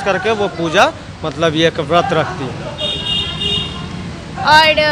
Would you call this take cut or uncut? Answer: uncut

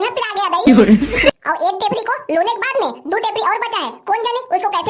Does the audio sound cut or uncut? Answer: uncut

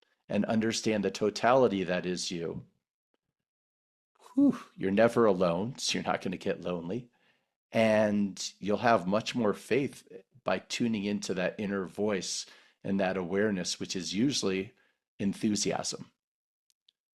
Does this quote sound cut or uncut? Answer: uncut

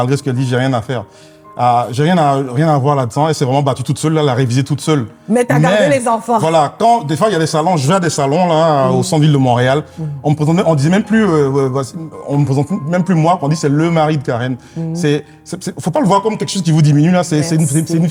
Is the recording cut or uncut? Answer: uncut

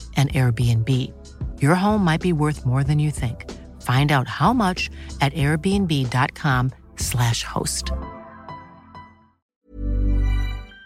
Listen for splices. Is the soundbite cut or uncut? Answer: cut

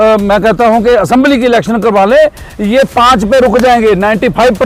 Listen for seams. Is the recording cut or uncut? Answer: uncut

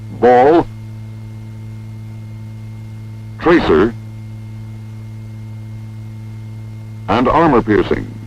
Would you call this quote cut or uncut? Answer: cut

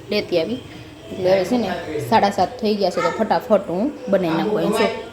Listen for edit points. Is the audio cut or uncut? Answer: uncut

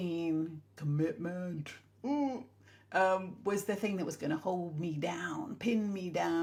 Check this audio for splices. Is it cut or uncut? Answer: uncut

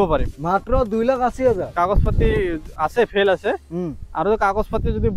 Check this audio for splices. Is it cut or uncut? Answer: uncut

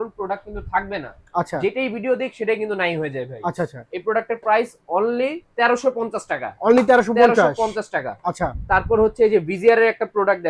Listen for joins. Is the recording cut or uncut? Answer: uncut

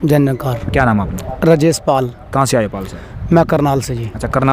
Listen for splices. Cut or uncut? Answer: uncut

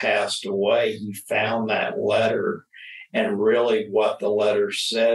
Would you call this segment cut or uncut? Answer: uncut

